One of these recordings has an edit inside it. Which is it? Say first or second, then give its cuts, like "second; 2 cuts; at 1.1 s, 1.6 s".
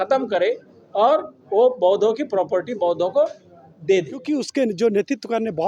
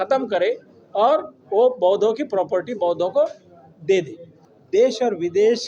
first; 1 cut; at 4.2 s